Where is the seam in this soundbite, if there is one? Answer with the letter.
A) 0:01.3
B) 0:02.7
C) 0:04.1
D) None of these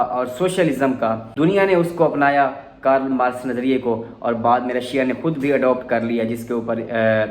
A